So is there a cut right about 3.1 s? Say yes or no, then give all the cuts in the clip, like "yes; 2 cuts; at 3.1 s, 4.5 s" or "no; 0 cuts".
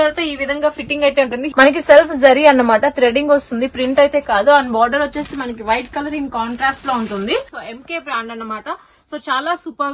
no; 2 cuts; at 1.4 s, 7.6 s